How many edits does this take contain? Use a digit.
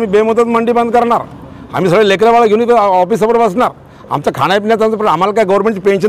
0